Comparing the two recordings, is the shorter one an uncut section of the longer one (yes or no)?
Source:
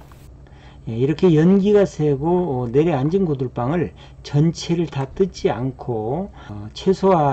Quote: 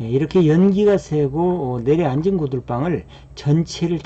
yes